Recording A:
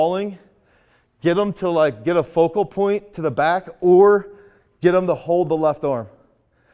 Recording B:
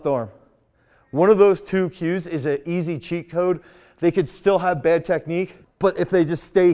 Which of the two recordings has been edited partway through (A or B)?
B